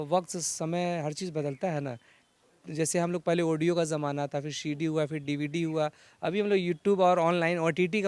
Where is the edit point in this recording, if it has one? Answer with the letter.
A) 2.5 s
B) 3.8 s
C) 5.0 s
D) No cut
D